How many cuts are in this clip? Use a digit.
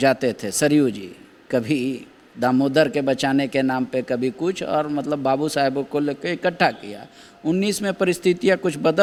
0